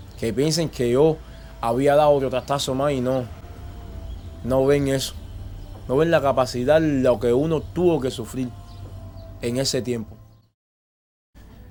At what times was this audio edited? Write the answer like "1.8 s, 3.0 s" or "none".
none